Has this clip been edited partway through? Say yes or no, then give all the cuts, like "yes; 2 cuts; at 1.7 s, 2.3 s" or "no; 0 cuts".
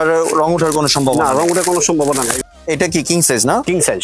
yes; 1 cut; at 2.4 s